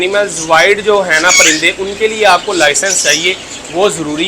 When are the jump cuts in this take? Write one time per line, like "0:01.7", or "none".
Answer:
none

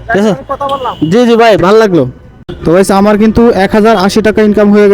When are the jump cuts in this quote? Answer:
0:02.6

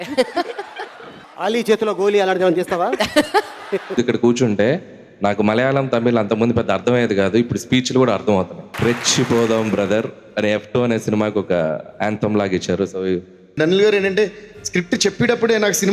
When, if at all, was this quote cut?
0:03.9
0:08.6
0:13.4

